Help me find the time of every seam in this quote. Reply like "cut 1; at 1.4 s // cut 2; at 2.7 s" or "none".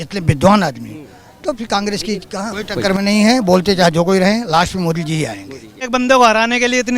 cut 1; at 2.6 s // cut 2; at 5.9 s